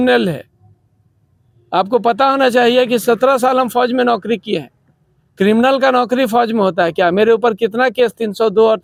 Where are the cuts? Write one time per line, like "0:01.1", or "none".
none